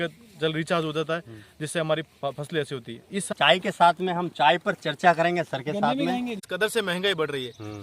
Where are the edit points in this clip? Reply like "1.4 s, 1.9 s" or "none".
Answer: 3.3 s, 6.4 s